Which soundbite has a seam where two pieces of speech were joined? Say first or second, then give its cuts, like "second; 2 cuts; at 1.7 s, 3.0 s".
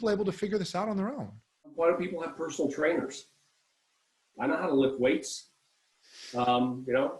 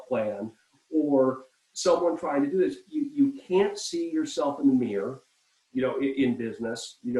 first; 1 cut; at 1.7 s